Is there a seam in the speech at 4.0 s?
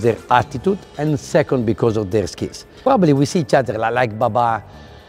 no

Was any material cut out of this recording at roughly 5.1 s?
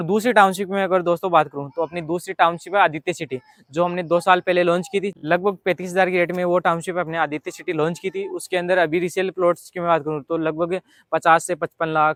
no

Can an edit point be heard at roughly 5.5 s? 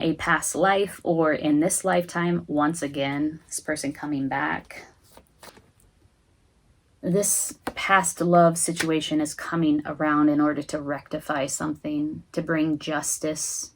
yes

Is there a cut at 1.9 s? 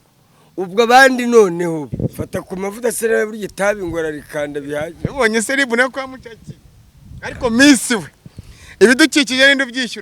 yes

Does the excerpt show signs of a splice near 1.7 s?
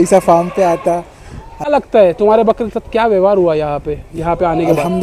yes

